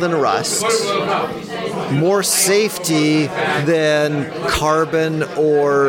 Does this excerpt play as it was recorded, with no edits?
yes; 0 cuts

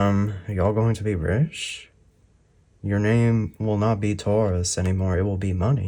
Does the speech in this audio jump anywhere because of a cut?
no; 0 cuts

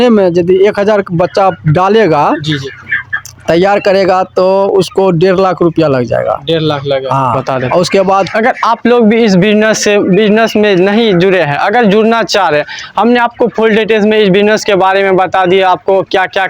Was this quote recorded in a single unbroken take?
no; 1 cut; at 8.3 s

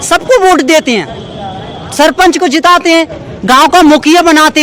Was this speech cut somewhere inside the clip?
no; 0 cuts

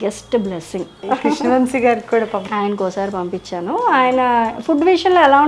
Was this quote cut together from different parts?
yes; 2 cuts; at 1.0 s, 2.4 s

